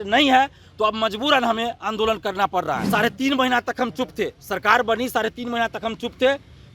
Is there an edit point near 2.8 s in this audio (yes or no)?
yes